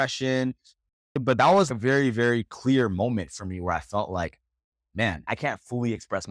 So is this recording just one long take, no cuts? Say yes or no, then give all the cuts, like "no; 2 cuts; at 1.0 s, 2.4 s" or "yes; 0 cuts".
no; 3 cuts; at 1.1 s, 1.7 s, 5.3 s